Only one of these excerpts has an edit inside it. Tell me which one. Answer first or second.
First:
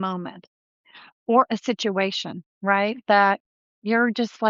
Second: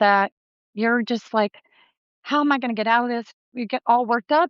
second